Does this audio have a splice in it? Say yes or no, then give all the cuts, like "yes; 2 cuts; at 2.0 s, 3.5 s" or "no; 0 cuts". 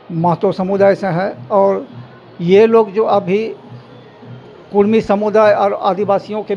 no; 0 cuts